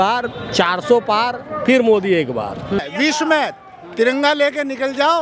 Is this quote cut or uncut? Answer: cut